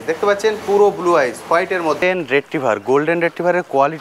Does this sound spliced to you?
yes; 1 cut; at 2.0 s

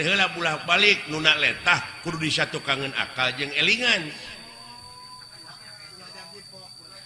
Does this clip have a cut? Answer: no; 0 cuts

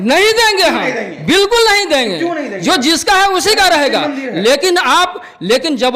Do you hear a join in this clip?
no; 0 cuts

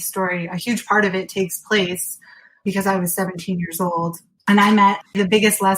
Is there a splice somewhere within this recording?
yes; 3 cuts; at 2.6 s, 4.3 s, 5.0 s

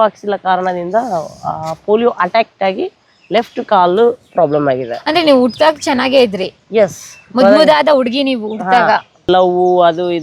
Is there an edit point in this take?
yes; 1 cut; at 9.1 s

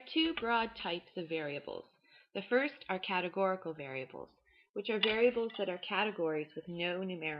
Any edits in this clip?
yes; 1 cut; at 3.4 s

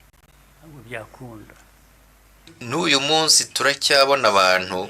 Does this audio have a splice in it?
yes; 1 cut; at 2.4 s

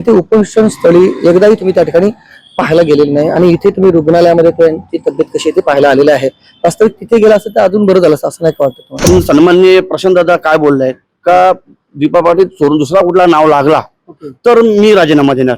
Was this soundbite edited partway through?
yes; 1 cut; at 8.9 s

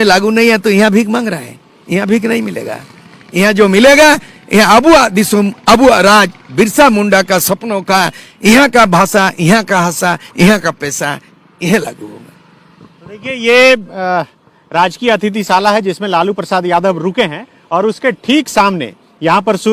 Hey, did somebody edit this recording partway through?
no; 0 cuts

